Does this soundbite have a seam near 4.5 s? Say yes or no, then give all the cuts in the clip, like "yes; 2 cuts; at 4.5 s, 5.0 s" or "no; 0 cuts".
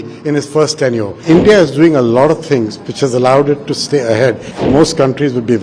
yes; 2 cuts; at 1.1 s, 4.5 s